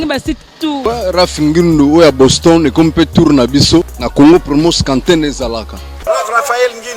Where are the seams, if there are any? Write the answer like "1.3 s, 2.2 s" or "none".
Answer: 0.8 s, 4.0 s, 6.0 s